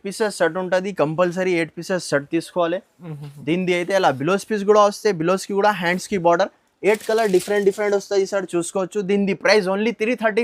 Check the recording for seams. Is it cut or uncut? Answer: uncut